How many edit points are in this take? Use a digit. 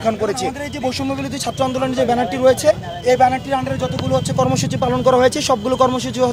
0